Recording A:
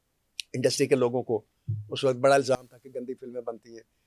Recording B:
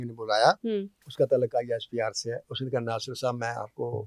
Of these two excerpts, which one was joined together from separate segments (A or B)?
B